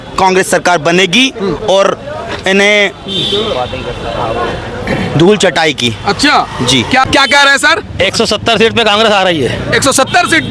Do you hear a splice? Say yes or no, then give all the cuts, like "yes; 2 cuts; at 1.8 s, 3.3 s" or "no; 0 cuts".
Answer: no; 0 cuts